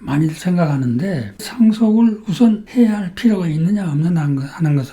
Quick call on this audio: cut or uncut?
cut